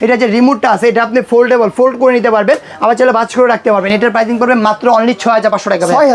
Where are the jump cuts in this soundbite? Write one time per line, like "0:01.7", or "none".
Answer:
none